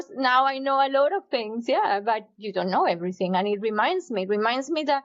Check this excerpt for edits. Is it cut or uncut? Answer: uncut